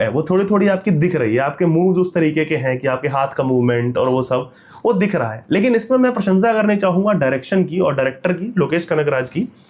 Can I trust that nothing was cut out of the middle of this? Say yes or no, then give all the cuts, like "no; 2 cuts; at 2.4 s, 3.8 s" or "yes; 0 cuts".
yes; 0 cuts